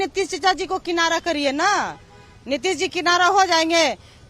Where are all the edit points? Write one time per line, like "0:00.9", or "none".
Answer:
none